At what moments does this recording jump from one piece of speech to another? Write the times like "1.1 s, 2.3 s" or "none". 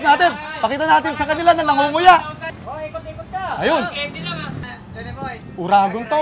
2.6 s, 4.7 s